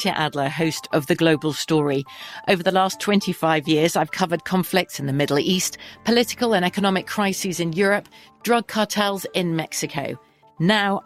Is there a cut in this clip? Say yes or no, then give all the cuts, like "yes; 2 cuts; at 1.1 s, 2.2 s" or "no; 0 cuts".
no; 0 cuts